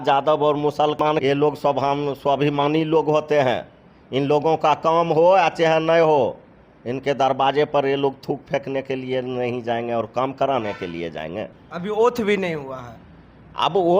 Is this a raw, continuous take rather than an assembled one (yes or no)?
no